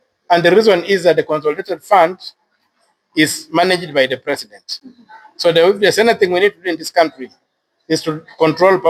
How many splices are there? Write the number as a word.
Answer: zero